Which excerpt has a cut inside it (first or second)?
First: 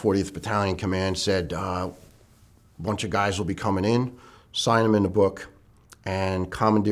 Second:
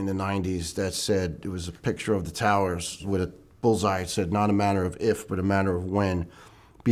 second